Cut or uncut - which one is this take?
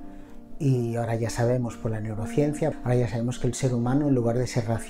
cut